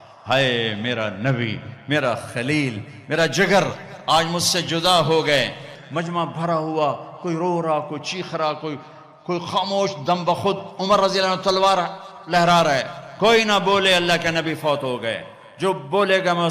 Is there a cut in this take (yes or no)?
yes